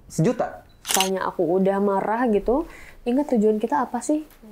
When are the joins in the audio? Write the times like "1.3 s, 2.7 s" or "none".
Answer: 0.9 s

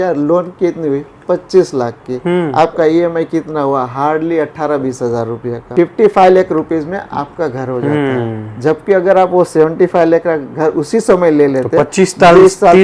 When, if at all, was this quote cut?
5.7 s

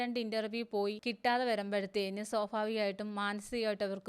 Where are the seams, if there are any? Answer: 1.1 s

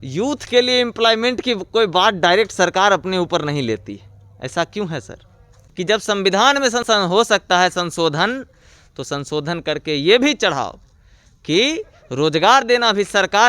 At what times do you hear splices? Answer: 5.6 s, 6.8 s

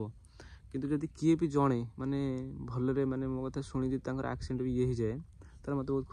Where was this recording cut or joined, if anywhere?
none

